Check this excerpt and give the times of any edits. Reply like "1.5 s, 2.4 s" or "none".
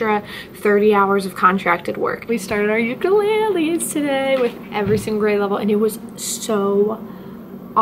2.2 s